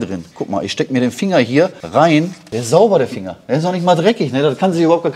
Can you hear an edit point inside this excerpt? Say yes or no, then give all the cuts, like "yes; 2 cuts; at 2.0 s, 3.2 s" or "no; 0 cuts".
yes; 1 cut; at 2.3 s